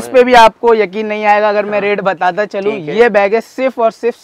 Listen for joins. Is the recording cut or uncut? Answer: uncut